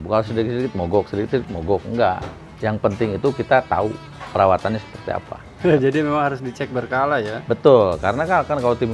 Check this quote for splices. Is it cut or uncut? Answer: cut